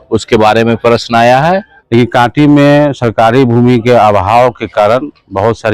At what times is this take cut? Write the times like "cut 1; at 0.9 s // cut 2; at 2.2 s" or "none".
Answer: cut 1; at 1.7 s